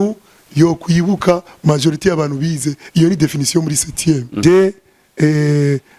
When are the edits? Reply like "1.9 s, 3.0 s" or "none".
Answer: 4.3 s

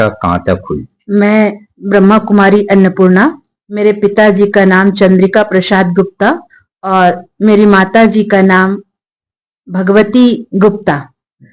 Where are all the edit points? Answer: 0.9 s

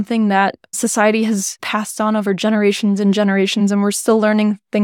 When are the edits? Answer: 1.6 s, 3.8 s

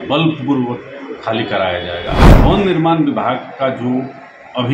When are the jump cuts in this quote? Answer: 2.3 s

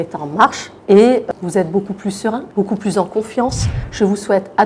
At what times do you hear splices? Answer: 1.3 s, 2.4 s, 3.7 s

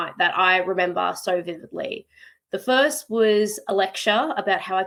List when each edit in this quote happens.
none

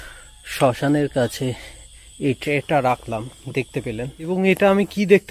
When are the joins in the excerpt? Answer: 4.3 s

